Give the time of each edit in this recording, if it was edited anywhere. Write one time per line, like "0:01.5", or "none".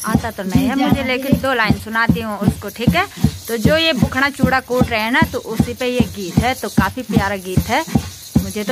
none